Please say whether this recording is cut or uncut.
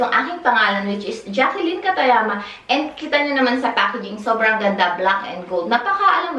uncut